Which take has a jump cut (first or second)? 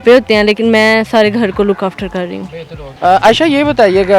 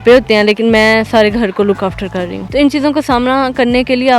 second